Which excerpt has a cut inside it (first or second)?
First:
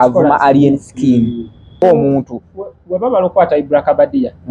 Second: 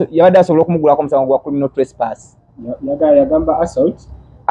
first